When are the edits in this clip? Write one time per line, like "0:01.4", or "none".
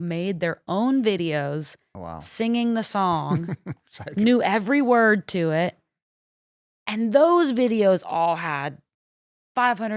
none